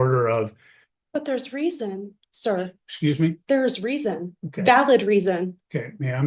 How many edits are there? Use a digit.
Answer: 0